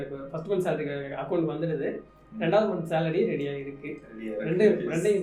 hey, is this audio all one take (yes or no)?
yes